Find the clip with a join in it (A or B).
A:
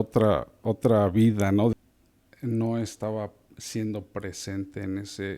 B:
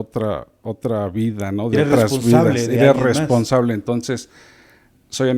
A